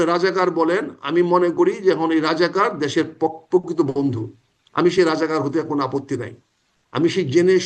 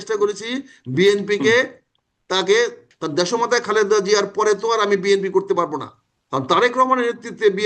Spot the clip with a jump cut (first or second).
second